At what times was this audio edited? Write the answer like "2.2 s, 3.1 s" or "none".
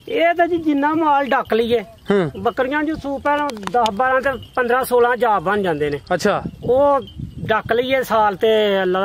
none